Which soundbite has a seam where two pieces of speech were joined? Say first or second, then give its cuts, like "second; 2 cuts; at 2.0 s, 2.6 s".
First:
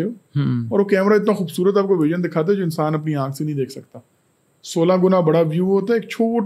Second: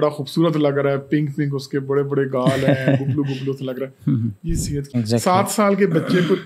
second; 1 cut; at 4.9 s